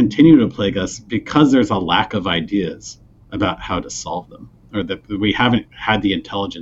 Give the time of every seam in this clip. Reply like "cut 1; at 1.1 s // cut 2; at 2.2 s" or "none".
none